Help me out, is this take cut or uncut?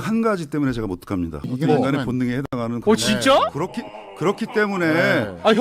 cut